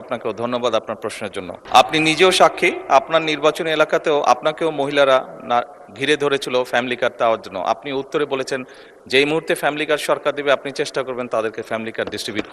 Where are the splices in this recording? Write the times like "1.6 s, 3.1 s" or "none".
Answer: 1.6 s